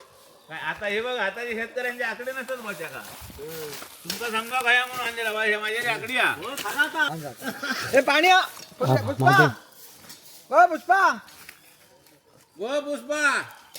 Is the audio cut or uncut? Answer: cut